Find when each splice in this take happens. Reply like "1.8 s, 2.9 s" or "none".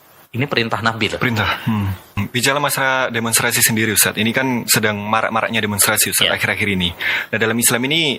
2.2 s